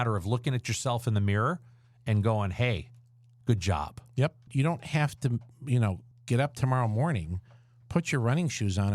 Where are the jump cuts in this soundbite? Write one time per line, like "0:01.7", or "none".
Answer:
0:04.5
0:06.1